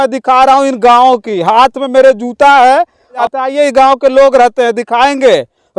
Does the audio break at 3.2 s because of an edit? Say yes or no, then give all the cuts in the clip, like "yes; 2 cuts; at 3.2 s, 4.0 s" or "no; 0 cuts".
yes; 1 cut; at 3.2 s